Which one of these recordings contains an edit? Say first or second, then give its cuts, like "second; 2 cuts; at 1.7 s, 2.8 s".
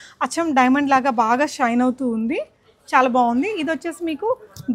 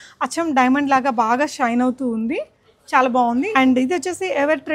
second; 1 cut; at 3.5 s